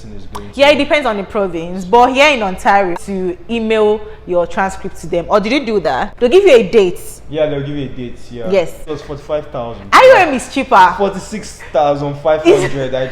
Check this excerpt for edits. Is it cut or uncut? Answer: cut